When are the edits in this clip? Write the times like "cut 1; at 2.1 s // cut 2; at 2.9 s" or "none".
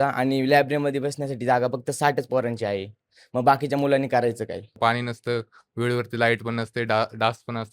cut 1; at 4.7 s